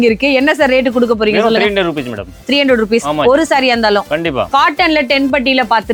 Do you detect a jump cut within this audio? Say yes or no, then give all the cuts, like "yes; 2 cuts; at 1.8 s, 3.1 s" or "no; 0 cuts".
yes; 1 cut; at 4.5 s